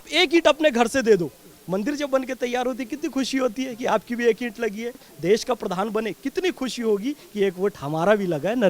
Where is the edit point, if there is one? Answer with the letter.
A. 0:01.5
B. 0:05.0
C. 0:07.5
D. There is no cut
B